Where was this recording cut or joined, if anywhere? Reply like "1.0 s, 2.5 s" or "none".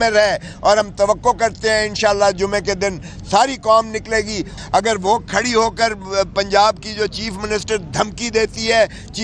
4.4 s